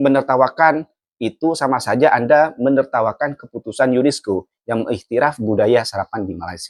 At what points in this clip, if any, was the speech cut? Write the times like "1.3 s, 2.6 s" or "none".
none